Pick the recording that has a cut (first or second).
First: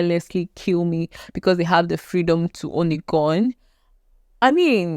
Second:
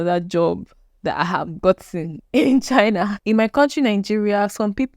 second